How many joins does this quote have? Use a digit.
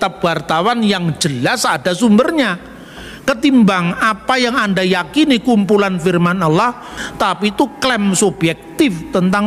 1